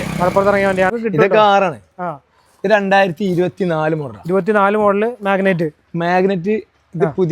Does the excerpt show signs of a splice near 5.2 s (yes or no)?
no